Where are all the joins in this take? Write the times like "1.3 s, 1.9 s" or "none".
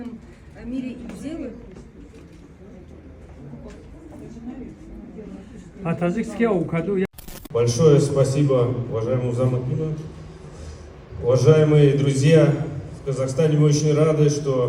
7.2 s